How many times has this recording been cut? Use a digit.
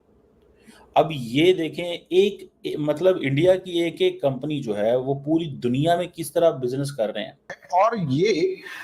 1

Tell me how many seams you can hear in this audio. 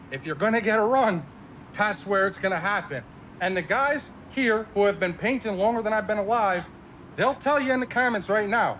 0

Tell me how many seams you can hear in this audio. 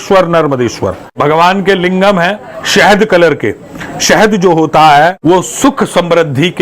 2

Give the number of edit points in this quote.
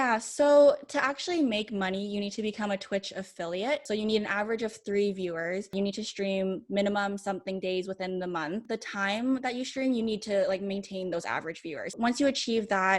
4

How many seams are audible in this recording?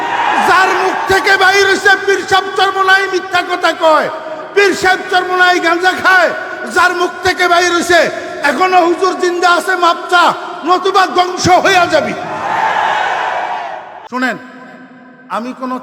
1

